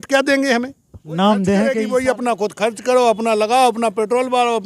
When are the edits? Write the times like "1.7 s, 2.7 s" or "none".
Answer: 1.8 s